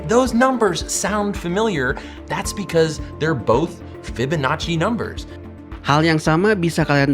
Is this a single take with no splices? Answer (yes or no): yes